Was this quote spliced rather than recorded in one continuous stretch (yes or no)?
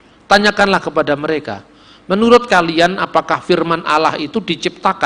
no